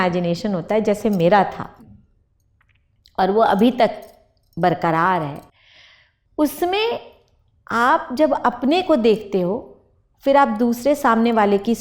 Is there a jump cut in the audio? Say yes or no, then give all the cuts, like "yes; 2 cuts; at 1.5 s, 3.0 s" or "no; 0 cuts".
no; 0 cuts